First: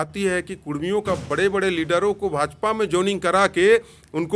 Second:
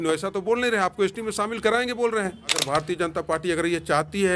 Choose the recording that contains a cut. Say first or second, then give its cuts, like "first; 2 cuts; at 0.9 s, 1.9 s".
second; 1 cut; at 2.6 s